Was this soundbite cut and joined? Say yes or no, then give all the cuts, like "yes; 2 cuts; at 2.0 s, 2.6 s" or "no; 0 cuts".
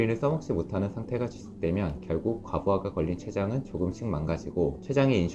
no; 0 cuts